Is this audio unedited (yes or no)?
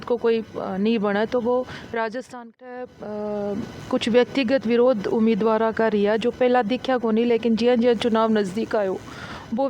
no